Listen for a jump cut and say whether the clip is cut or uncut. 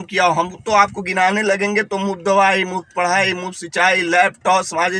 uncut